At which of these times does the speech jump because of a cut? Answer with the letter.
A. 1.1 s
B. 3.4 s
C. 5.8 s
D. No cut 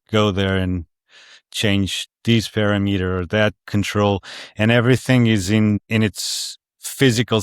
C